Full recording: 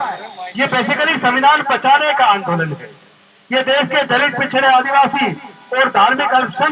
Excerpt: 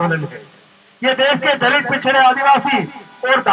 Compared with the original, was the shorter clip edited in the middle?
no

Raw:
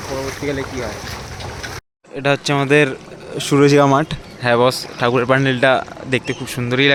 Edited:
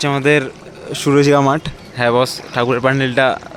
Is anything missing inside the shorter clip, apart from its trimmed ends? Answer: no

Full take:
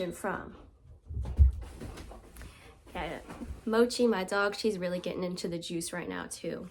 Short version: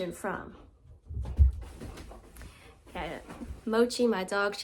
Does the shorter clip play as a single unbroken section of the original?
yes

